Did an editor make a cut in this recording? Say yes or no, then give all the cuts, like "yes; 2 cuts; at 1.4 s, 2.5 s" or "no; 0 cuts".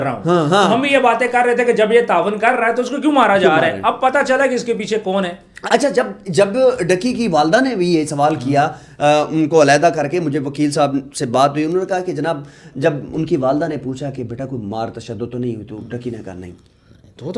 no; 0 cuts